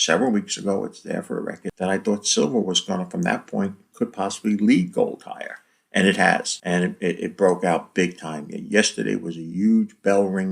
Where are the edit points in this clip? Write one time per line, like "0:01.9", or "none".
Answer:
0:01.6
0:06.5